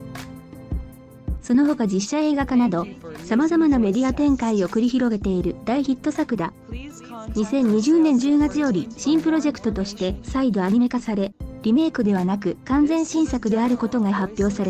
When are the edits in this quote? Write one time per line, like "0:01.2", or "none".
0:01.5